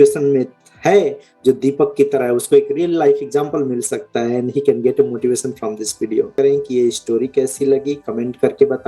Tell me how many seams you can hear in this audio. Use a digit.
1